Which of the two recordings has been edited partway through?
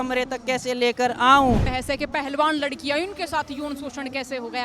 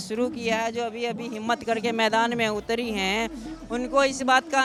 first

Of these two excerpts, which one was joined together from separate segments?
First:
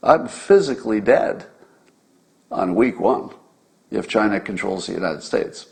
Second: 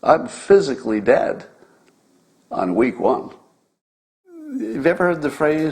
second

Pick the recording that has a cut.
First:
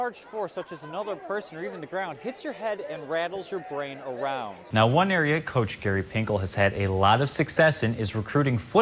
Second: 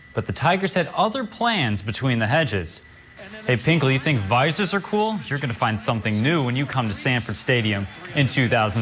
first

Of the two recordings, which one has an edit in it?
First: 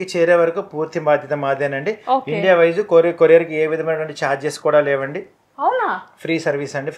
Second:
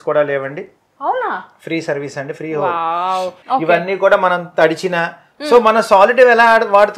second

